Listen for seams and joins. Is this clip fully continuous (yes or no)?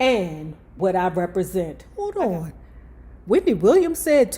no